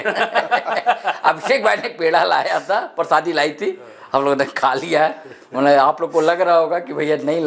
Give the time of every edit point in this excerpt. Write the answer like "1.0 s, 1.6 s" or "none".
none